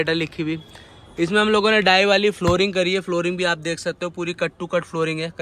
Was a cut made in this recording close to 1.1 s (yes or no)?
no